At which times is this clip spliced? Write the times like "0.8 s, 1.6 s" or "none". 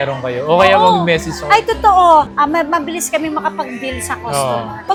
none